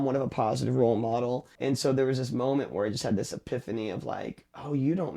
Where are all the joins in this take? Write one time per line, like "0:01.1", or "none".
0:01.5